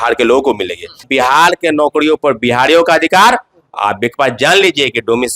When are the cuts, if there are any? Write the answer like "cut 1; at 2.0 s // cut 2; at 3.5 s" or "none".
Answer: cut 1; at 1.1 s